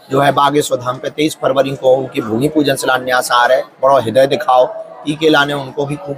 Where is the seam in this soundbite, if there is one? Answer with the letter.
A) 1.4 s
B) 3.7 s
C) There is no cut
C